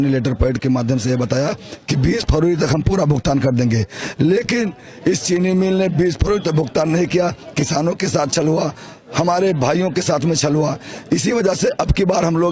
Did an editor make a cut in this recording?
no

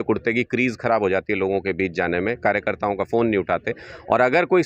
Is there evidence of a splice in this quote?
no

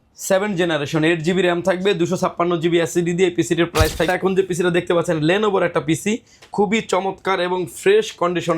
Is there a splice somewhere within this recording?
yes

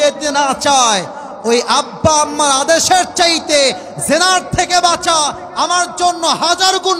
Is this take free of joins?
yes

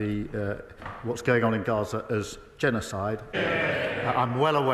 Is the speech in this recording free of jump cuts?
no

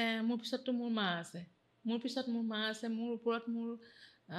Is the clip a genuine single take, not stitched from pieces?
yes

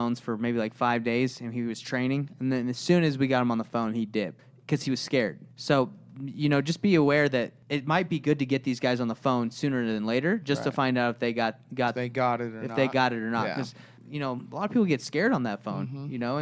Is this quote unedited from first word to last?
no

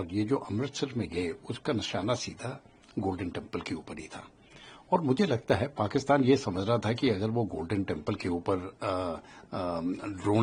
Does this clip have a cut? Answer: no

